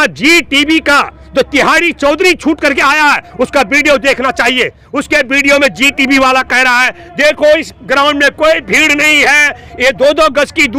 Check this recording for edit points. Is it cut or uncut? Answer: uncut